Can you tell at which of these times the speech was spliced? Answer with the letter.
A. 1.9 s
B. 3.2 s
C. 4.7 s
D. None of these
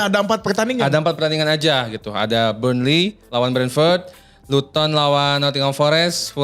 D